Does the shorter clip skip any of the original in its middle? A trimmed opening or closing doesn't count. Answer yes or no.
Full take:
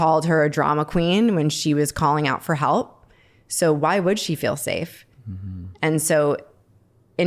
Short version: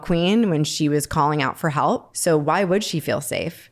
yes